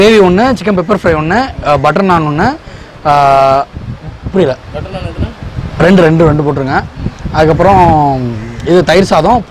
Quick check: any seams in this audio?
no; 0 cuts

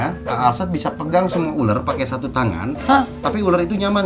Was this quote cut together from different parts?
no; 0 cuts

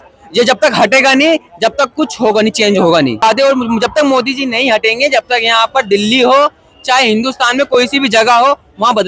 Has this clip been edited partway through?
yes; 1 cut; at 3.2 s

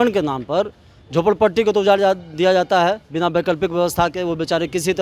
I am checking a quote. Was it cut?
no; 0 cuts

